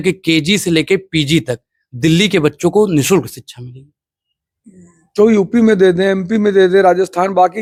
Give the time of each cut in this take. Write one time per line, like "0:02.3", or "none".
none